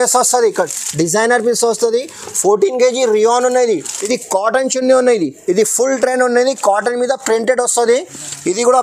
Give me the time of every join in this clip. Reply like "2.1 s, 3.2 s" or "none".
3.9 s